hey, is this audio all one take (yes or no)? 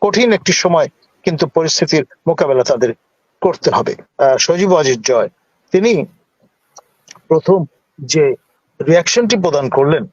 no